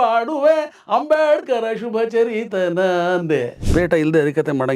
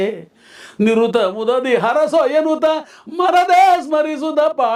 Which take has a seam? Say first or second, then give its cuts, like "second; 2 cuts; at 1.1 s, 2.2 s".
first; 1 cut; at 3.6 s